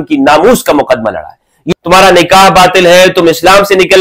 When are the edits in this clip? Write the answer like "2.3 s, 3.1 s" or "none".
1.7 s